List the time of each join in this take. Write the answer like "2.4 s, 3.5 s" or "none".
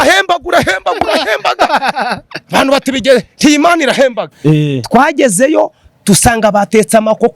4.3 s